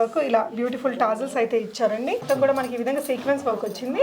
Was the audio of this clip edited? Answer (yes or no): yes